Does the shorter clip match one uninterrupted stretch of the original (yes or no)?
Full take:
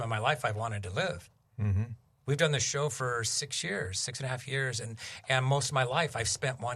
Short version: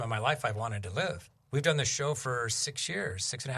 no